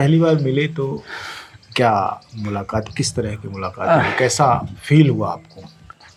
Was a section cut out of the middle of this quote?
no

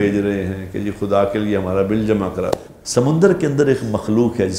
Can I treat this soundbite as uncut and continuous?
no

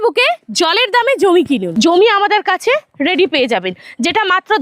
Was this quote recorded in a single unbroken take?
no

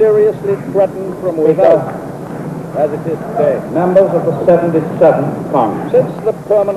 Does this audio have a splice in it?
no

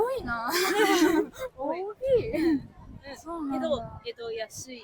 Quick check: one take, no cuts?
yes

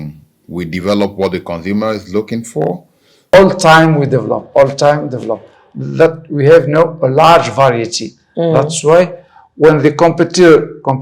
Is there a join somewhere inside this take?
yes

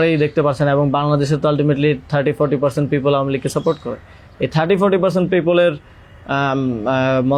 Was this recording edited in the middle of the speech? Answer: no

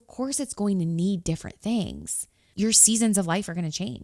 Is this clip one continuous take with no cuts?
no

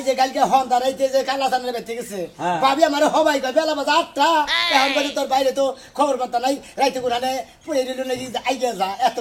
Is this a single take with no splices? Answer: yes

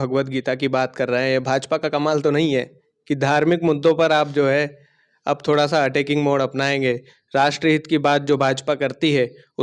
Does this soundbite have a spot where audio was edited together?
no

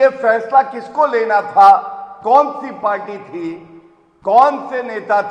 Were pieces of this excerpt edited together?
no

